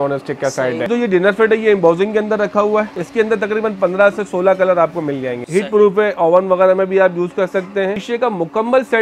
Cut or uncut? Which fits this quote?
cut